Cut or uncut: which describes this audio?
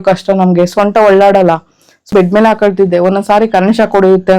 cut